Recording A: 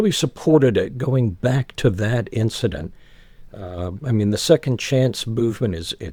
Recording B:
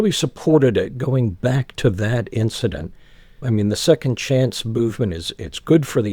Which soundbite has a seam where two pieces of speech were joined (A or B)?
B